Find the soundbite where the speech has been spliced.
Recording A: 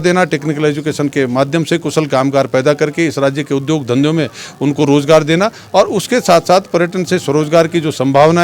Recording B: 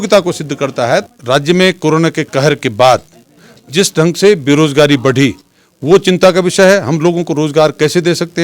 B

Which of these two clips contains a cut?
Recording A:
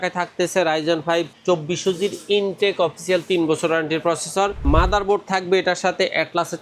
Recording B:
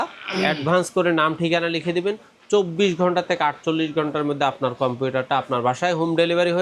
A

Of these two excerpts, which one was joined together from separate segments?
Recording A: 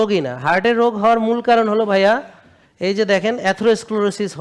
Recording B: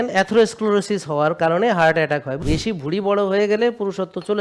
B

